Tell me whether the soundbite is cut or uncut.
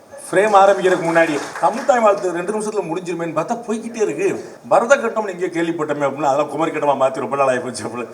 cut